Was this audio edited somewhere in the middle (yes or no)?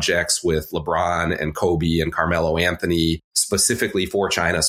yes